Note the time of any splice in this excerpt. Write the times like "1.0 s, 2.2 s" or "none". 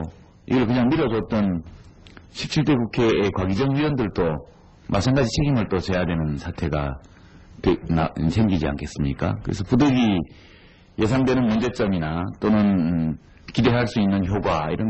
12.2 s